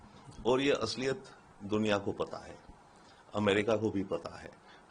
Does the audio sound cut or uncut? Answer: uncut